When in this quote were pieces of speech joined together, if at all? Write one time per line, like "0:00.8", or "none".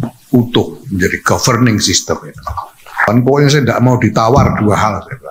0:03.1